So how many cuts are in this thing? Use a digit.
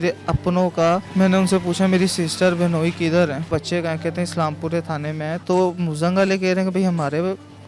2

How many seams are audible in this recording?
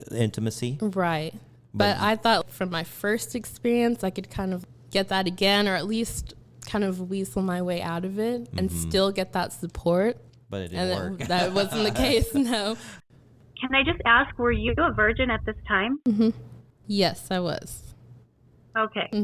1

